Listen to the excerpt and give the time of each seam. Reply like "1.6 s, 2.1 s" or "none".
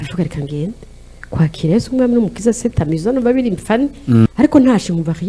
4.3 s